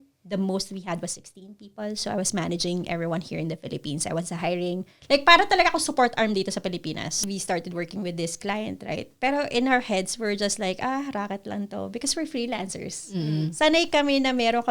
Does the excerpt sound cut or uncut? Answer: cut